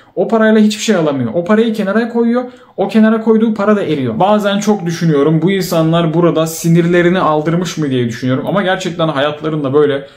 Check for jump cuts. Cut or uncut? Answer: cut